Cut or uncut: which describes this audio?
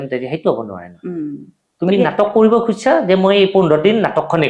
uncut